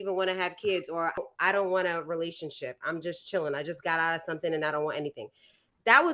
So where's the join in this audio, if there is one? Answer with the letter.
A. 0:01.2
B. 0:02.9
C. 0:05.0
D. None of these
A